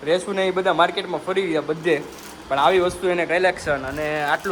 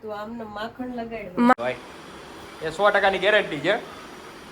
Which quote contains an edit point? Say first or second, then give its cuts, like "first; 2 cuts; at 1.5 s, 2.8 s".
second; 1 cut; at 1.5 s